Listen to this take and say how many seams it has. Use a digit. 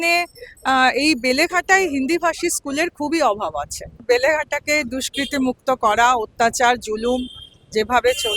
1